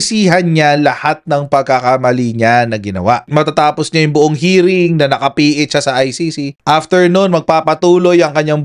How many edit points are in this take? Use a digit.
1